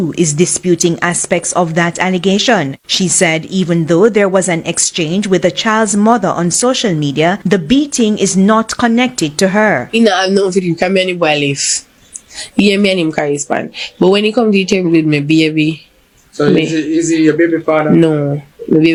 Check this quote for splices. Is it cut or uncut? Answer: uncut